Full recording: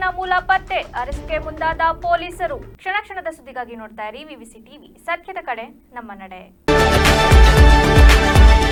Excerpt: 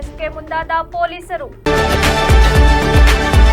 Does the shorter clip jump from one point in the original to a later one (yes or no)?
yes